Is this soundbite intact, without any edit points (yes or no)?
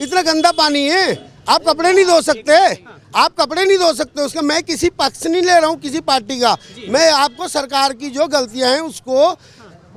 yes